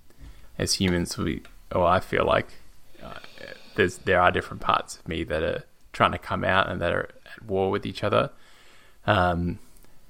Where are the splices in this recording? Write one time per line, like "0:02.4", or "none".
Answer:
none